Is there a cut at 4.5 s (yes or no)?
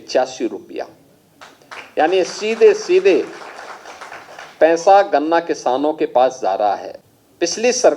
no